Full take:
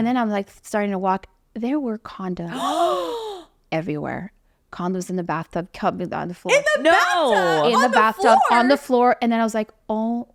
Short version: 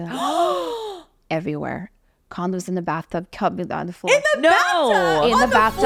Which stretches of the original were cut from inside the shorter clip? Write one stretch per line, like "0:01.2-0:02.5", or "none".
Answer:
none